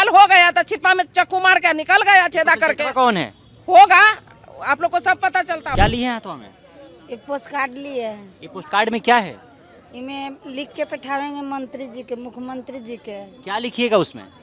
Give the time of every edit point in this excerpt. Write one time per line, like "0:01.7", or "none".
0:05.7